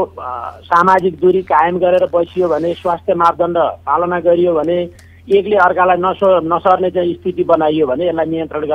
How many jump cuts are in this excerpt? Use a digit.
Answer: 0